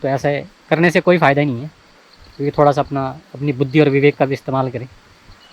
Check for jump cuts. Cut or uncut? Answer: uncut